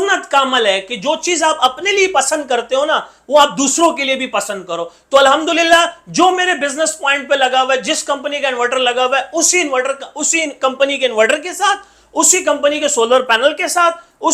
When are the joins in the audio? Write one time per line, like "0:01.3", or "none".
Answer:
none